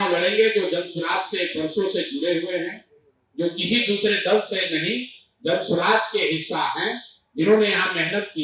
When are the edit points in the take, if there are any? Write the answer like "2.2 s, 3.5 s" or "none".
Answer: none

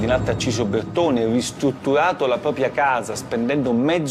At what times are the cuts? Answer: none

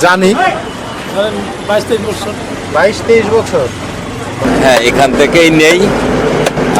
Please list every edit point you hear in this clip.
4.4 s

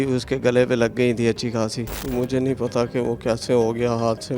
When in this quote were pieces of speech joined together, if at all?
1.9 s

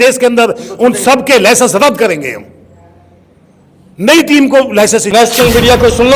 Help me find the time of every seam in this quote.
5.1 s

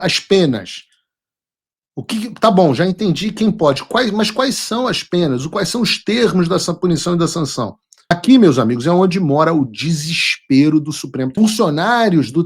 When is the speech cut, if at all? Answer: 8.1 s, 11.3 s

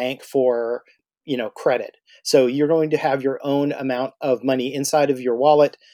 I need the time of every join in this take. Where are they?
1.0 s

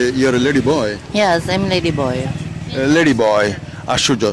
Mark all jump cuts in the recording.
none

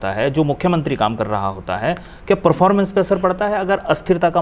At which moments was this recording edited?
none

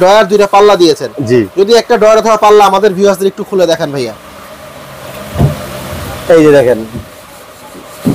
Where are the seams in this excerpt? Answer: none

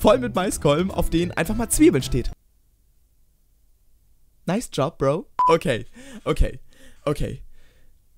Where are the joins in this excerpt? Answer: 5.4 s

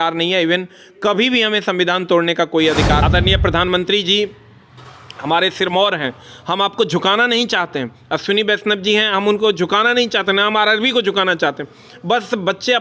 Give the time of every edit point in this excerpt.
3.0 s

